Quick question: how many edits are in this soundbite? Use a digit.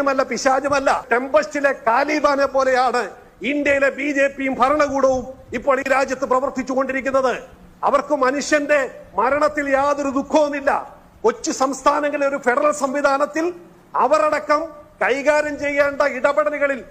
1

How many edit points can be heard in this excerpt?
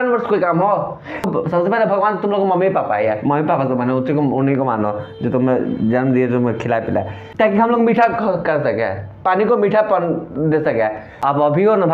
3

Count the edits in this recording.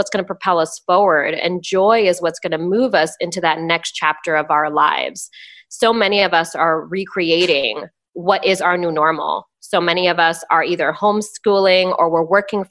0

